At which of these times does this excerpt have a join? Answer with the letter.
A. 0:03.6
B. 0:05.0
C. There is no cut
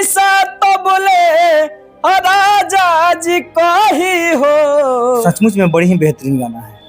B